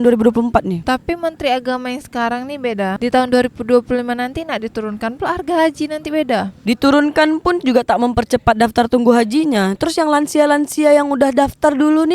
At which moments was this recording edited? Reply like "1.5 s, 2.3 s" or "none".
0.8 s, 3.0 s